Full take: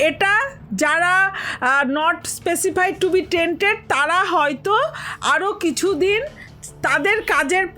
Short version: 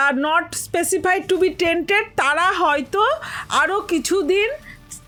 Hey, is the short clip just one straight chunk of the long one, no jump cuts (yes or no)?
yes